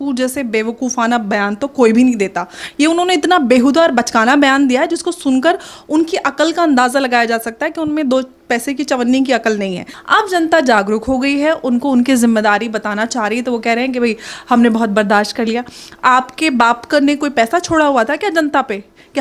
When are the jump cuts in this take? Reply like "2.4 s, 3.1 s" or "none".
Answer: 9.9 s